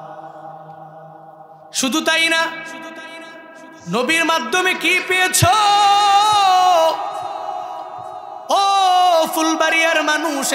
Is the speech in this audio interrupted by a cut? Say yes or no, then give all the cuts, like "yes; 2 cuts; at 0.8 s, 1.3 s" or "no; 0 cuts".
no; 0 cuts